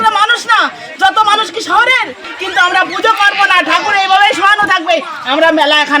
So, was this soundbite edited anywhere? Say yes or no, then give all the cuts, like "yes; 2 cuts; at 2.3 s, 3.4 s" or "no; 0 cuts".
yes; 1 cut; at 2.3 s